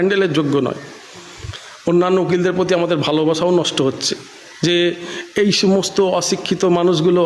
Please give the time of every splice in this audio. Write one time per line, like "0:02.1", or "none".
none